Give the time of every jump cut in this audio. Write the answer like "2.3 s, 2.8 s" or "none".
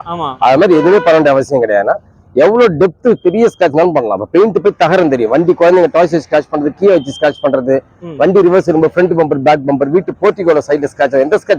none